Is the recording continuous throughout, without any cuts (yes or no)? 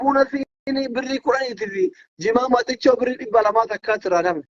yes